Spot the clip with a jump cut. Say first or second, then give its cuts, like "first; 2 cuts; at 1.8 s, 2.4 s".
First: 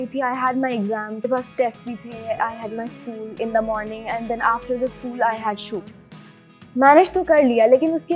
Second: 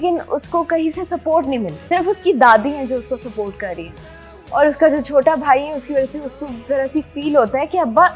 second; 1 cut; at 1.8 s